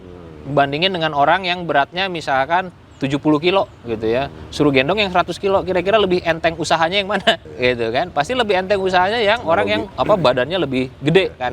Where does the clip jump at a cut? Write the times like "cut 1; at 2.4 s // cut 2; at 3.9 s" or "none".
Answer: cut 1; at 7.5 s // cut 2; at 9.9 s